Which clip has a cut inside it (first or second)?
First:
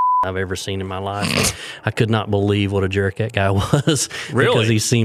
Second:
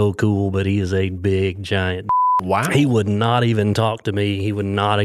second